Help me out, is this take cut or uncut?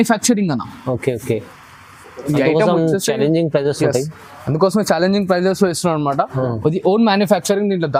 uncut